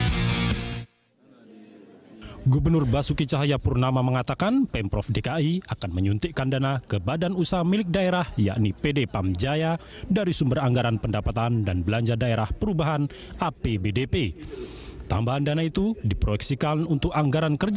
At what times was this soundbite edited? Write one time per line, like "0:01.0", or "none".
0:02.8